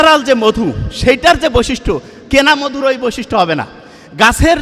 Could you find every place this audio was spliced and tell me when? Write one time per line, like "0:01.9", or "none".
none